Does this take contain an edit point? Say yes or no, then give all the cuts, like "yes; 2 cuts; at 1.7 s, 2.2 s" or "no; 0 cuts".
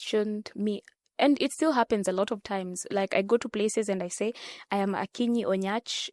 no; 0 cuts